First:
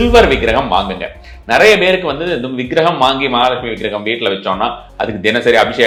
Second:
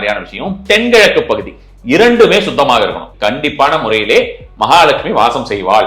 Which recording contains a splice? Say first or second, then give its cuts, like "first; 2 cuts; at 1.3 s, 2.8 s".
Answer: second; 1 cut; at 3.1 s